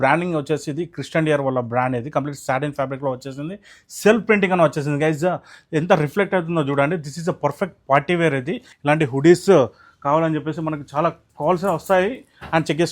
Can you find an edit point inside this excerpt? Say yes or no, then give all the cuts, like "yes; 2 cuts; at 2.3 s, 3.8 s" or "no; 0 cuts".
yes; 1 cut; at 8.7 s